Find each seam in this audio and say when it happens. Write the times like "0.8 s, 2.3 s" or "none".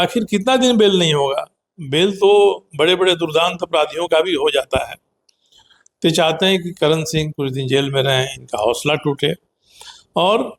none